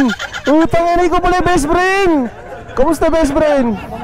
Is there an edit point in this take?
no; 0 cuts

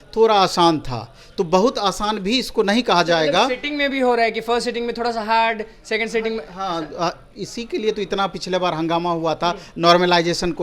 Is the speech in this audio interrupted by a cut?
no; 0 cuts

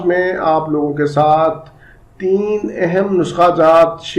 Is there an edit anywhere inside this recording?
no; 0 cuts

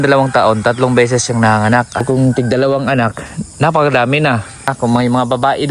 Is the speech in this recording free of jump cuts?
no; 2 cuts; at 2.0 s, 4.7 s

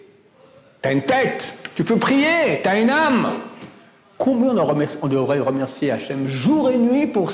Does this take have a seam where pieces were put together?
no; 0 cuts

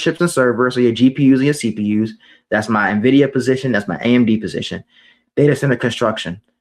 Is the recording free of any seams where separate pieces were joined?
yes; 0 cuts

